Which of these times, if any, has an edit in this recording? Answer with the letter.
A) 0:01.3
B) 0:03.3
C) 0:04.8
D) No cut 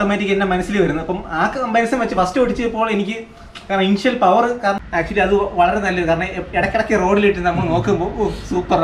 C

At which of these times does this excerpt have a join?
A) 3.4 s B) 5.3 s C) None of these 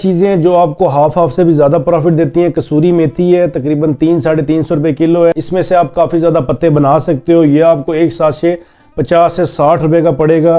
B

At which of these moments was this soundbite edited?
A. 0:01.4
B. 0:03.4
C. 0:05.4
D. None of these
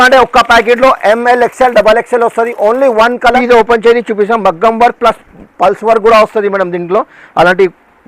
B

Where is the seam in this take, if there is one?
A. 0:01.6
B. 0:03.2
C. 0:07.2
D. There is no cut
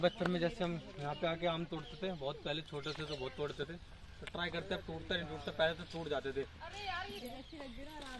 C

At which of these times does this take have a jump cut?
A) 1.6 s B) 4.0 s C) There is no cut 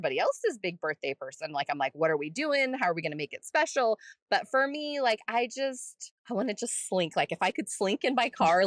C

